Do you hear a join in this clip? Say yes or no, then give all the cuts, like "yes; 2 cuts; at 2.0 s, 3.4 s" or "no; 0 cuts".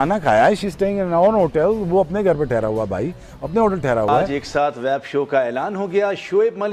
yes; 1 cut; at 4.3 s